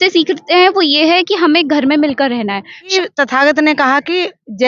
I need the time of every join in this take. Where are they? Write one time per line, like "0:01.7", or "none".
0:02.9